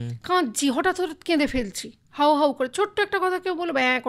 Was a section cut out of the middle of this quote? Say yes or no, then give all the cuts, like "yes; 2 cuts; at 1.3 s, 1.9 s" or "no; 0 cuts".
no; 0 cuts